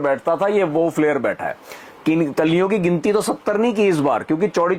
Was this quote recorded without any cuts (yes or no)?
yes